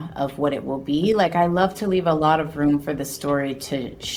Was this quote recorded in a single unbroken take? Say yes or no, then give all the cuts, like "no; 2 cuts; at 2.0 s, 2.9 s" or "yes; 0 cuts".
yes; 0 cuts